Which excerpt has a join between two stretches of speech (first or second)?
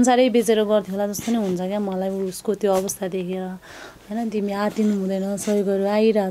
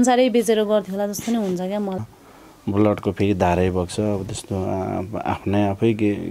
second